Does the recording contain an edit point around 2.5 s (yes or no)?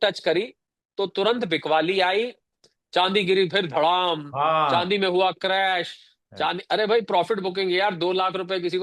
yes